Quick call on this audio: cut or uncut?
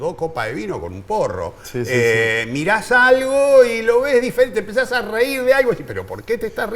uncut